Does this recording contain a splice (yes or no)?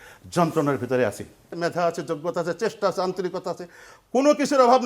yes